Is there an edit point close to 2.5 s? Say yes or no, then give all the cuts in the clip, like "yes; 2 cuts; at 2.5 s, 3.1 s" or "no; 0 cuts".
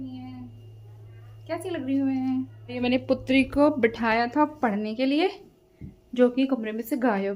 no; 0 cuts